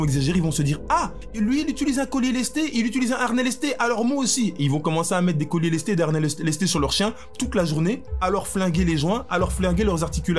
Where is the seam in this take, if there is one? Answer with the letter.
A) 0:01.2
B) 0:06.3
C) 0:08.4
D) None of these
A